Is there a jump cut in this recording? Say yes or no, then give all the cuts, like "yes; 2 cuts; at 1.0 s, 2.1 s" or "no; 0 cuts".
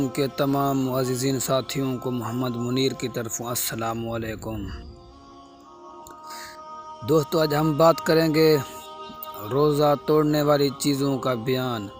no; 0 cuts